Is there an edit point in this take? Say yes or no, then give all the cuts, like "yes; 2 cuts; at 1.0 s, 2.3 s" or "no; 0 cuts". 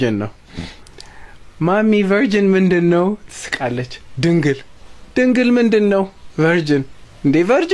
no; 0 cuts